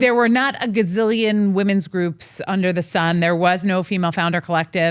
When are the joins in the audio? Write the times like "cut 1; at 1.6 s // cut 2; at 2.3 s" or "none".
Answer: none